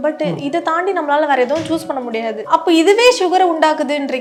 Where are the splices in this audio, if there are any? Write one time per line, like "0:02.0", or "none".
none